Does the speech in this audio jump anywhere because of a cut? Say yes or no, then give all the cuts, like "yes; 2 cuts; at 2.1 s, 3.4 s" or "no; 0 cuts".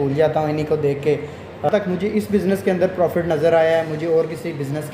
yes; 1 cut; at 1.7 s